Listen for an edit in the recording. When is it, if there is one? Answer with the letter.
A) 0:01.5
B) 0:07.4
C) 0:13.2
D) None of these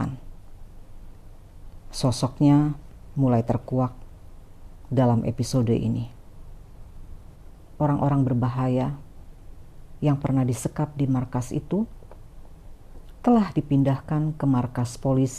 B